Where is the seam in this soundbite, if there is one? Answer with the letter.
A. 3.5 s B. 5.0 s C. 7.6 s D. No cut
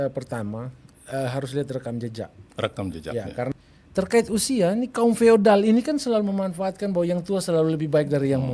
A